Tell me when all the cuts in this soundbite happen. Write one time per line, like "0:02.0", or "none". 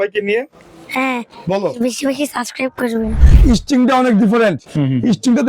0:03.2